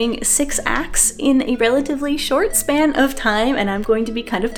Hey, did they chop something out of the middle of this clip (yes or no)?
no